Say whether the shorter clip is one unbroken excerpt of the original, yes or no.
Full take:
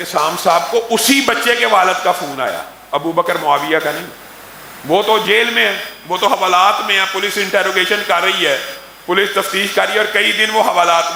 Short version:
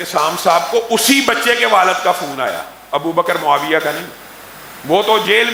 yes